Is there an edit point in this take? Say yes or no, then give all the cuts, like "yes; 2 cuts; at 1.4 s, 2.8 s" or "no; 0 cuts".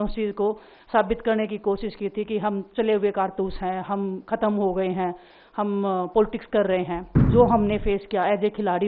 yes; 1 cut; at 7.3 s